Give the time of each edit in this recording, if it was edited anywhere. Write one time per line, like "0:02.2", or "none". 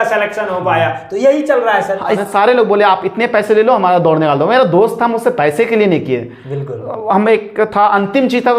0:02.2